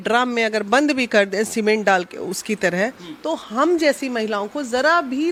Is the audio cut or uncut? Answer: uncut